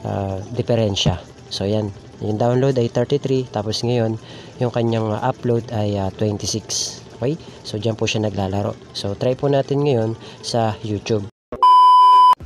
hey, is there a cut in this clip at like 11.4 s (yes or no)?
yes